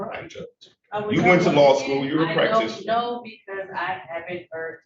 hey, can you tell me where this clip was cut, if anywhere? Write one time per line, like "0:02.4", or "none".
none